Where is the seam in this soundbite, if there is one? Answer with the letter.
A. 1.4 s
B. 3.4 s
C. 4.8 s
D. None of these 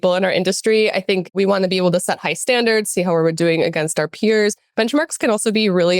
A